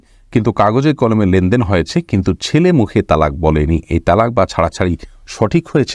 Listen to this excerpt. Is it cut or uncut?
uncut